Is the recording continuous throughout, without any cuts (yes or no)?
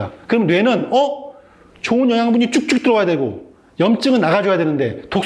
yes